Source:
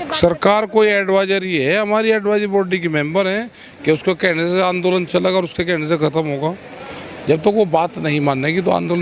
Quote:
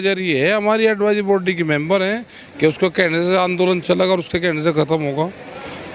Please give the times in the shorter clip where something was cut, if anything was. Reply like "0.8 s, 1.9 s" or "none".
none